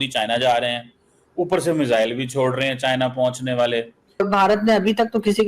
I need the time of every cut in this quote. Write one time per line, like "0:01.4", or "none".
0:04.2